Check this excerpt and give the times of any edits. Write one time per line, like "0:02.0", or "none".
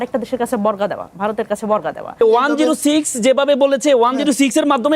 0:02.2